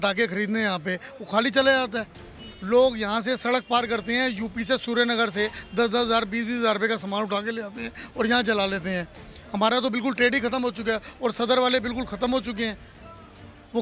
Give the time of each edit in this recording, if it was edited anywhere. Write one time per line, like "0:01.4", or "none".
none